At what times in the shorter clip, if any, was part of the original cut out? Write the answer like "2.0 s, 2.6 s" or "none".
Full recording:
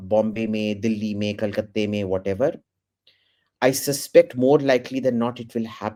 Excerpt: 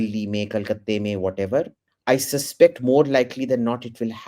1.8 s

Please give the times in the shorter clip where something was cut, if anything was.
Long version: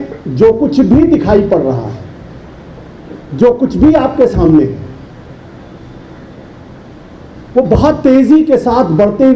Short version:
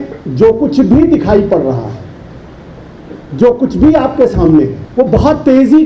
4.8 s

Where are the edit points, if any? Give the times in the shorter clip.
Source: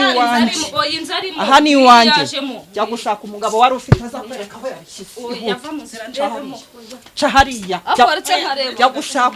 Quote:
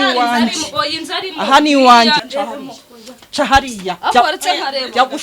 2.3 s

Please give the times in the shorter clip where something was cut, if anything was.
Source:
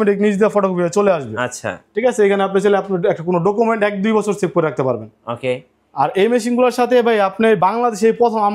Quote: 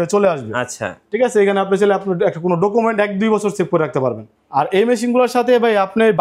4.3 s

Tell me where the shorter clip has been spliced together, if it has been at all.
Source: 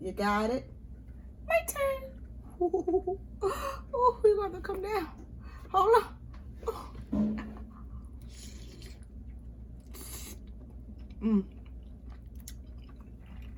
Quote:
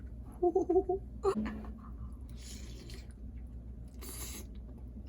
1.4 s

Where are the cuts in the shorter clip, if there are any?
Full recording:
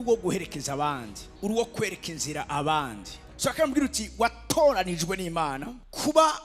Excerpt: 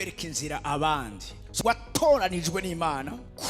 1.5 s

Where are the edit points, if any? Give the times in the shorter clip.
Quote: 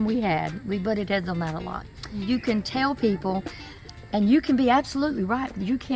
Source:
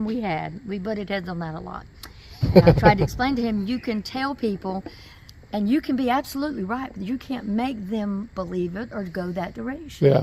2.3 s

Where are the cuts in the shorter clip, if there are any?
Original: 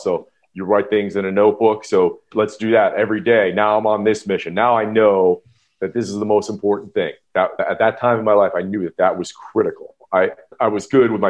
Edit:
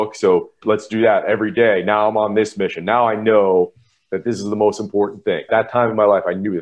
5.5 s

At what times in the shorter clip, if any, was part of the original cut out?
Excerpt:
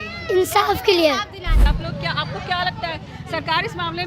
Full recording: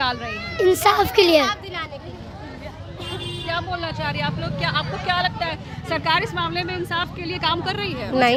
1.6 s

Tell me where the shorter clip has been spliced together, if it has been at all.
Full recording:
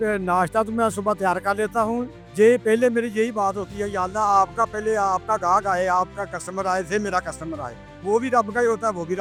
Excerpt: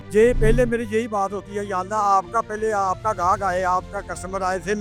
none

